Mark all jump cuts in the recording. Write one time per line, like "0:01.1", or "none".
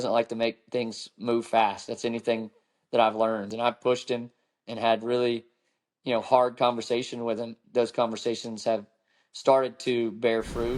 0:03.5
0:07.6